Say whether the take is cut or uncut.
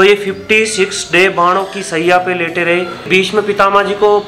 cut